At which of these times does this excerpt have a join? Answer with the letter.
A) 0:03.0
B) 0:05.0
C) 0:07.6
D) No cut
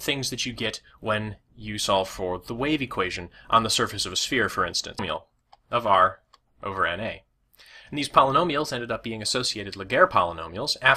D